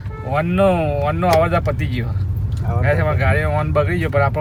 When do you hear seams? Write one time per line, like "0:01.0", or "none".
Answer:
none